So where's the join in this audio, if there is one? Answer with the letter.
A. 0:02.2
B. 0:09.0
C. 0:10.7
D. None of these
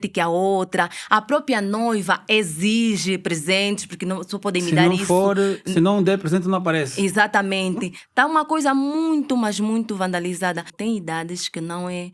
C